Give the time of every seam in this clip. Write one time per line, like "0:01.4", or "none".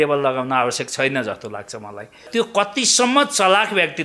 0:02.3

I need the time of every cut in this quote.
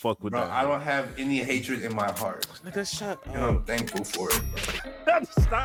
none

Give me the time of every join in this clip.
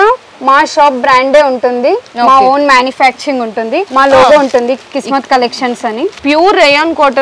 0:03.8
0:06.2

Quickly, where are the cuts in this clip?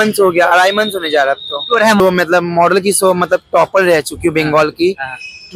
0:02.0

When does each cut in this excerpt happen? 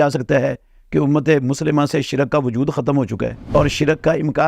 0:03.4

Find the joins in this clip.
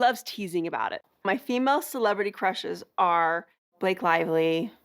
0:01.1

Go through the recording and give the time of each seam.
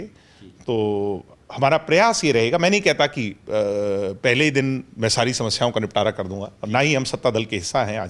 none

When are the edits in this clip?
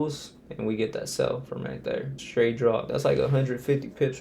0:02.2
0:02.9

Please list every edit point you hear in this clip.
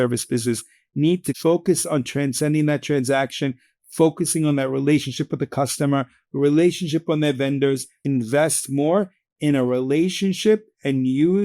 0:01.3
0:08.0

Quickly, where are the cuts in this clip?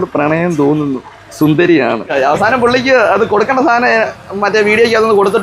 0:02.0

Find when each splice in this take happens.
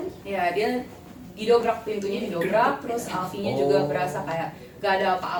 none

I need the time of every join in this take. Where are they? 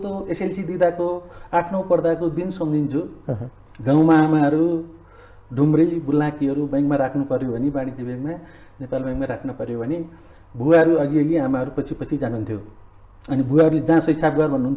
none

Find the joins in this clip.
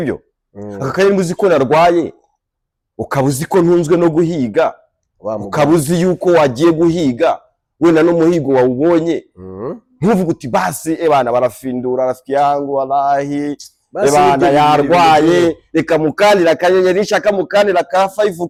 none

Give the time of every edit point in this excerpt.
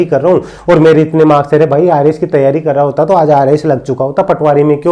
none

